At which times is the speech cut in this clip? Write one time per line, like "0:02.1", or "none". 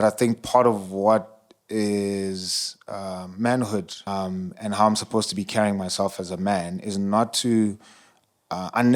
0:04.0